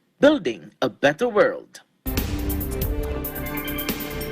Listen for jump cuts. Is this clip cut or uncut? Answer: cut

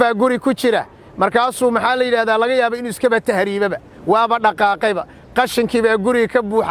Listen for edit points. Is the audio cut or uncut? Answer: uncut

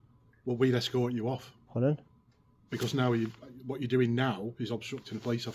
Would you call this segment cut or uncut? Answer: uncut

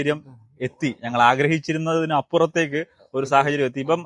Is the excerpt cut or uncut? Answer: uncut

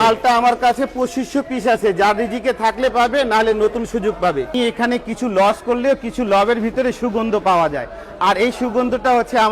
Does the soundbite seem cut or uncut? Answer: cut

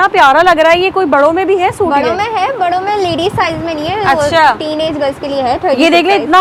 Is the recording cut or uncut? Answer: uncut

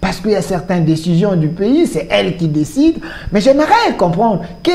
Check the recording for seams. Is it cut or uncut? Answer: uncut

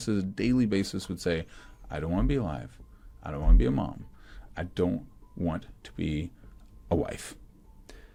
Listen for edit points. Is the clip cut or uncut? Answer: uncut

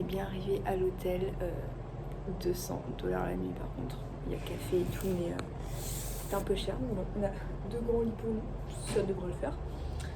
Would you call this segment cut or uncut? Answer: uncut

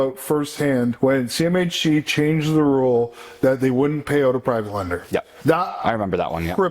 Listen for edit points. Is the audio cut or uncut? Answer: cut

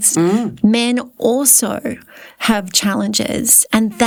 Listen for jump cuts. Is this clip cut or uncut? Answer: uncut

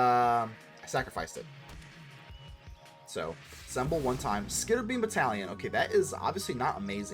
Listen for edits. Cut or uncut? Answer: cut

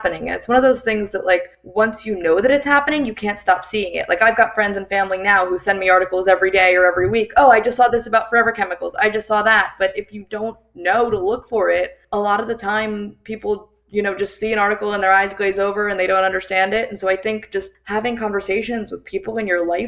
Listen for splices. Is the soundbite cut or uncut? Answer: cut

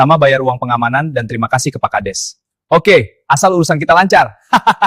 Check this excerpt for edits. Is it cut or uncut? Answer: uncut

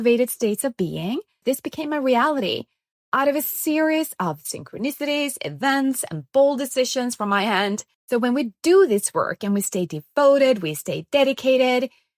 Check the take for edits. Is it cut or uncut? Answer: cut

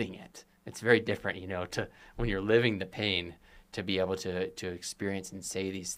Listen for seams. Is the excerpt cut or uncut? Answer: uncut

